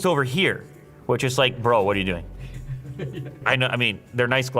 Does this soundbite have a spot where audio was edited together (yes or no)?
yes